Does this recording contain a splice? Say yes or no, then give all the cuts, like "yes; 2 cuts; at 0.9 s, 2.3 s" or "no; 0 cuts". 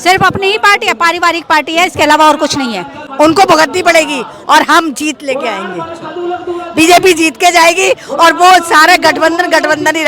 yes; 1 cut; at 3.0 s